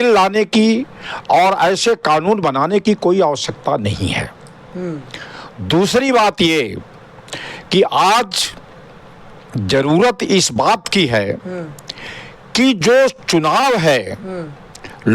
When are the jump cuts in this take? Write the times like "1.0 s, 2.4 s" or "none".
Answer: none